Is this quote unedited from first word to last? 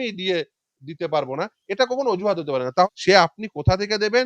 no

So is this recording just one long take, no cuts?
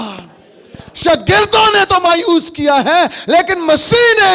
yes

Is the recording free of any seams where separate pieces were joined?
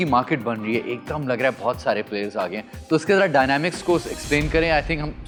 yes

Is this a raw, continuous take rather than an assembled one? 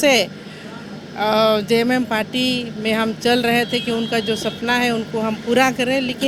yes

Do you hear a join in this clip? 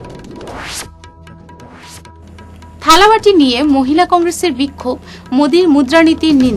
yes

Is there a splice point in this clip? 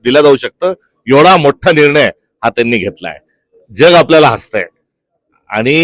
no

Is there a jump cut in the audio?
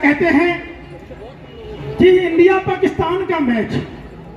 no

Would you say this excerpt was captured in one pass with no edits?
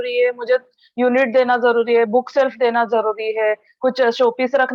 yes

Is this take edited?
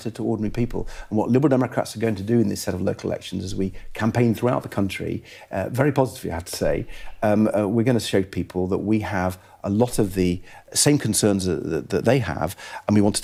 no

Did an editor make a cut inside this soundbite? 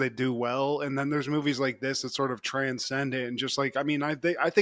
no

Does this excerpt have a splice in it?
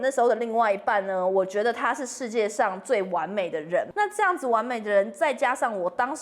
yes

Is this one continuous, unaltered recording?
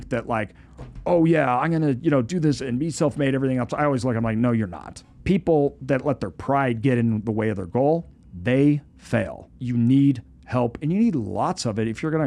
yes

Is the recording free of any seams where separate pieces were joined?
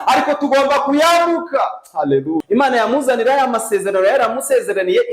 no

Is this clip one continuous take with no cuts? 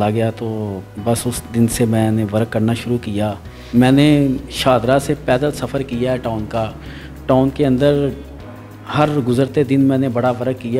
no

